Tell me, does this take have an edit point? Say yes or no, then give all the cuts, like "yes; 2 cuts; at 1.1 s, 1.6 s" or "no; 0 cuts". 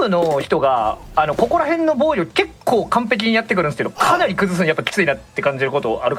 no; 0 cuts